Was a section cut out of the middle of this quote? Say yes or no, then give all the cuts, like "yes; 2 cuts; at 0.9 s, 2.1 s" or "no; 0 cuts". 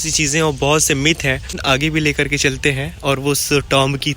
yes; 1 cut; at 1.6 s